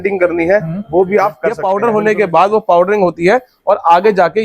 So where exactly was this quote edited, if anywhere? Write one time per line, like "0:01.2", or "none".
0:01.5